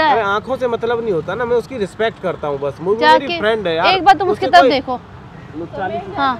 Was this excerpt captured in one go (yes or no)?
yes